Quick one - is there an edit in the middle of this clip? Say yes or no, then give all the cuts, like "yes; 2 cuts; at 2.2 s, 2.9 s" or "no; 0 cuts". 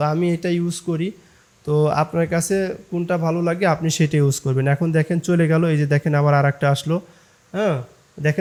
no; 0 cuts